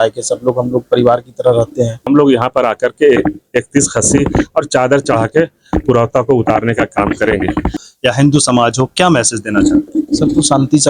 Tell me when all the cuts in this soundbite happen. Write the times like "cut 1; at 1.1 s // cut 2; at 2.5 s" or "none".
cut 1; at 2.0 s // cut 2; at 7.8 s